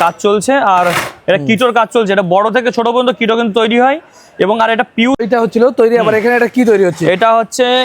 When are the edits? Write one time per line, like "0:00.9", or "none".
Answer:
0:05.2

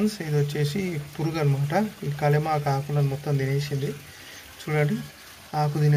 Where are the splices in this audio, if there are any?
none

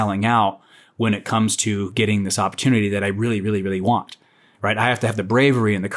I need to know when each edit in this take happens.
none

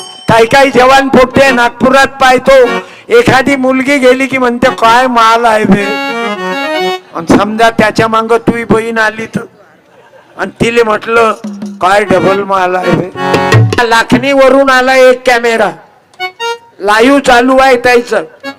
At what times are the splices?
0:13.8

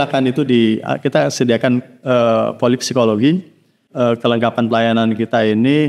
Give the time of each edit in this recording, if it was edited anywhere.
0:03.8

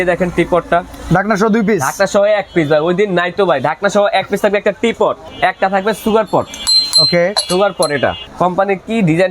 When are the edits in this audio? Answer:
0:05.2
0:08.2

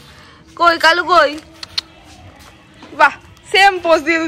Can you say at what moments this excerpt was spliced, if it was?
none

